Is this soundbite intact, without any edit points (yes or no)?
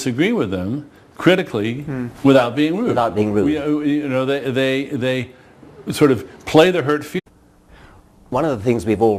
yes